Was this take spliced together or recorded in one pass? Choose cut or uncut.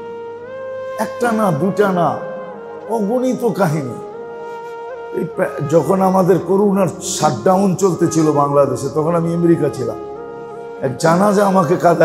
cut